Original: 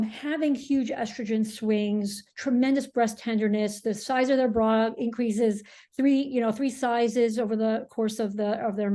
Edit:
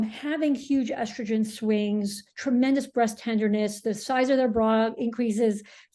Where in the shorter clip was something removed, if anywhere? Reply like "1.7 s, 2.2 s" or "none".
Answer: none

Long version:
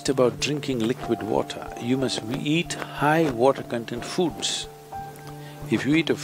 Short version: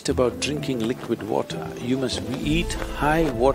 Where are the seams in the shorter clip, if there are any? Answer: none

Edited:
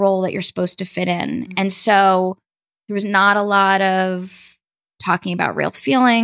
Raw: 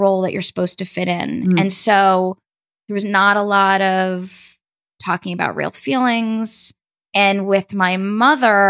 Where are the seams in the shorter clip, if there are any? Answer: none

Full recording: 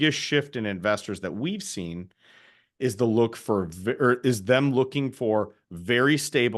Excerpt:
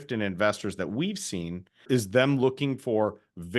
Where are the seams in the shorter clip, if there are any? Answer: 1.9 s

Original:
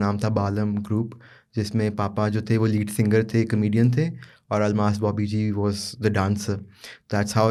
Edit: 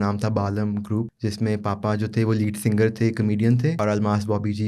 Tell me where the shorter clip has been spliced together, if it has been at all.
1.1 s, 3.8 s

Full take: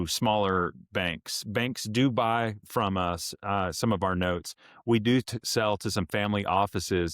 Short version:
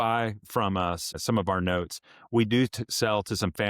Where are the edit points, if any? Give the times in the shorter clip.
1.2 s

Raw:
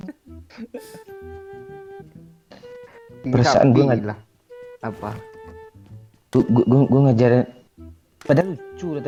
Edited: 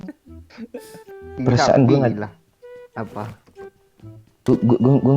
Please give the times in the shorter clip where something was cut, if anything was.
1.2 s

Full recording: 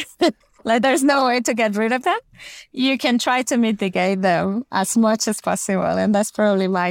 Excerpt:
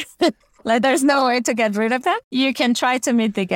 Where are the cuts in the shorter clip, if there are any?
2.2 s

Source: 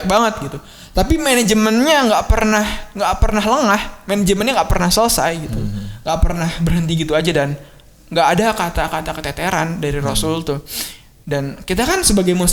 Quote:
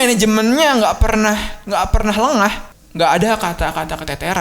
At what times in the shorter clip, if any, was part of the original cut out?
2.7 s

